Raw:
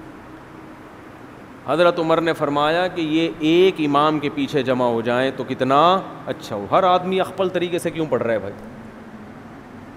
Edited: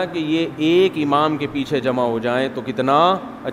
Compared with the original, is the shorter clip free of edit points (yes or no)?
yes